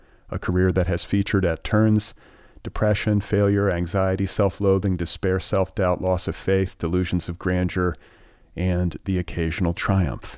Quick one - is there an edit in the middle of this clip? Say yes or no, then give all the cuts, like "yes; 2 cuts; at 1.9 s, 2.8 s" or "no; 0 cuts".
no; 0 cuts